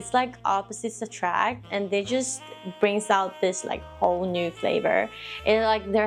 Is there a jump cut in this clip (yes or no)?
no